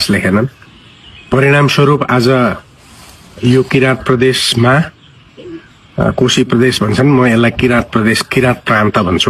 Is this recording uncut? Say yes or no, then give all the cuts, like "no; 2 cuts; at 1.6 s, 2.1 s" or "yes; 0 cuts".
yes; 0 cuts